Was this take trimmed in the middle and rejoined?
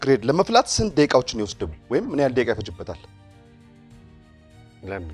no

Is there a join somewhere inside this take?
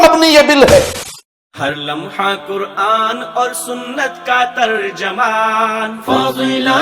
yes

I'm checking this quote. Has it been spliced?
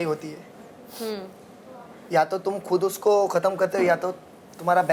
no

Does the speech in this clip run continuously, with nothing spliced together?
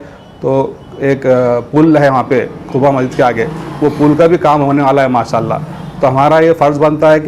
yes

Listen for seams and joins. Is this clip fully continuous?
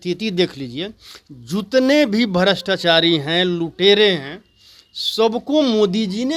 yes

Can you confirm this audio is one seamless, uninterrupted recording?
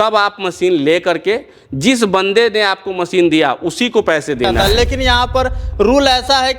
no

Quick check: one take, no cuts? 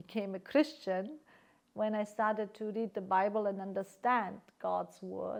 yes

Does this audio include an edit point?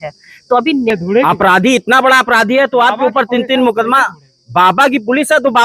yes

